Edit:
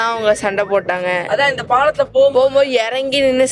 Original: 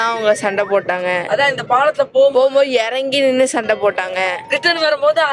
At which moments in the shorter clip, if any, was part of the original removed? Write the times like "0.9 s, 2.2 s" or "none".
none